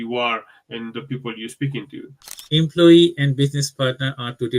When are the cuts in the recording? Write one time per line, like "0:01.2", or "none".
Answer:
0:02.4